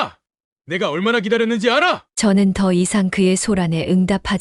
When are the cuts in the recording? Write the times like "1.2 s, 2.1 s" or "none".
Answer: none